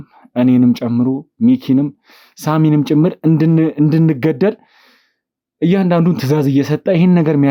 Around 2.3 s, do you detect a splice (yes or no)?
no